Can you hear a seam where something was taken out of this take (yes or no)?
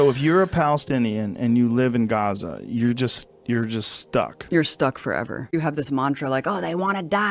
yes